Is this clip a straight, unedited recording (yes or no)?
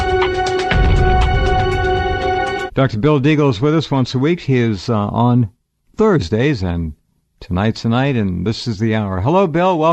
yes